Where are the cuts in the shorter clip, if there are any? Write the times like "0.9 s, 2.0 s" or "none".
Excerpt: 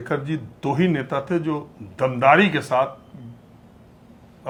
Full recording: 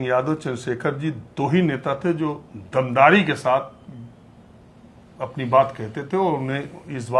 none